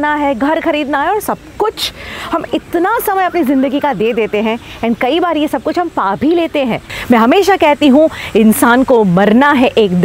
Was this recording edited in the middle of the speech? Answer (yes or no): yes